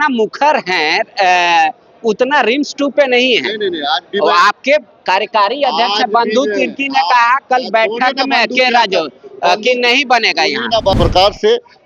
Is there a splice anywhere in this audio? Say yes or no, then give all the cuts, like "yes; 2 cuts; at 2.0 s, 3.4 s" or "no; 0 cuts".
yes; 1 cut; at 11.0 s